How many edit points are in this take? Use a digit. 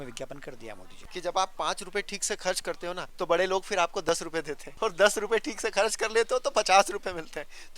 3